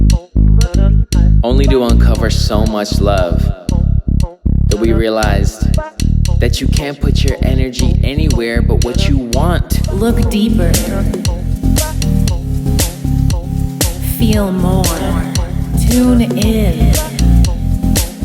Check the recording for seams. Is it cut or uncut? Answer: cut